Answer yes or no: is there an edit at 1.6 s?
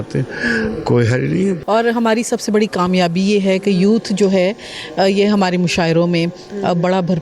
yes